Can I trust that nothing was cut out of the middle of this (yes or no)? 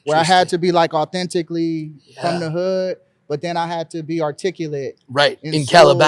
yes